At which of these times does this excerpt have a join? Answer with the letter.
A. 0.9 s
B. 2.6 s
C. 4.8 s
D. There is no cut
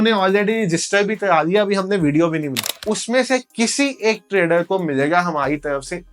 B